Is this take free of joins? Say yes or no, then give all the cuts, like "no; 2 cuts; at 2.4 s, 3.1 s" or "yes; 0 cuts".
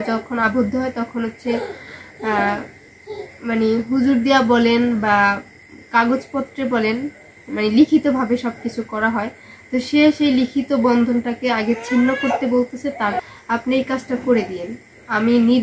no; 1 cut; at 13.2 s